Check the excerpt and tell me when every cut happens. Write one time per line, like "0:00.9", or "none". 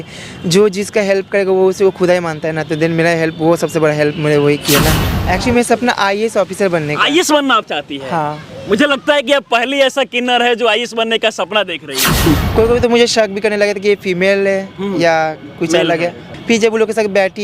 0:05.0
0:12.3
0:16.3